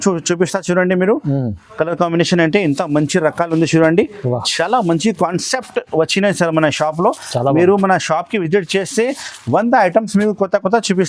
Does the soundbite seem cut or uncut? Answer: uncut